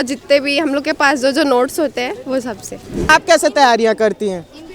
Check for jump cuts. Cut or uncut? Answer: cut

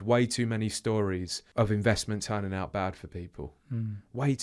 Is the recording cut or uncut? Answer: cut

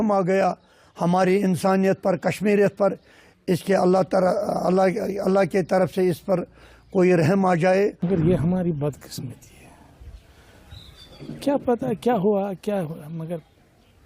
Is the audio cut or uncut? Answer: cut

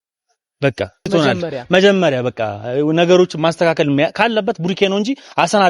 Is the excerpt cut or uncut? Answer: cut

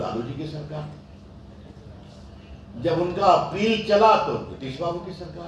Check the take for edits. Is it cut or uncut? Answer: uncut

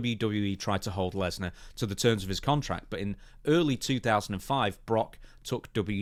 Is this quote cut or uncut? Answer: uncut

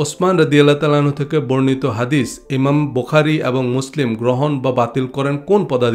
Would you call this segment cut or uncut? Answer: uncut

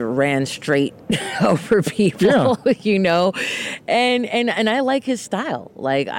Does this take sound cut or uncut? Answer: uncut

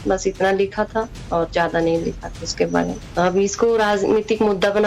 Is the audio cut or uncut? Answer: cut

